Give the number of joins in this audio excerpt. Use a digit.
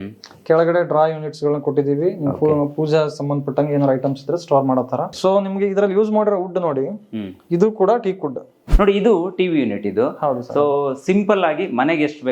2